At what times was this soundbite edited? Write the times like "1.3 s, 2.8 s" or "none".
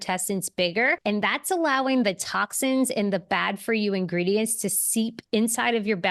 1.0 s